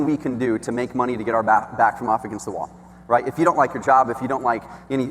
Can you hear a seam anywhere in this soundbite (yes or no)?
no